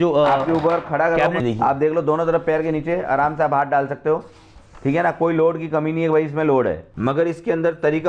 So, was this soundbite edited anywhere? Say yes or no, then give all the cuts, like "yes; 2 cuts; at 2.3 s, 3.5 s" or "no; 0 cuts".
yes; 2 cuts; at 1.4 s, 6.9 s